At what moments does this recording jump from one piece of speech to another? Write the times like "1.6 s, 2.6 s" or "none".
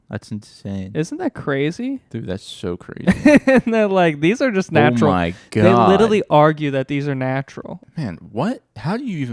7.8 s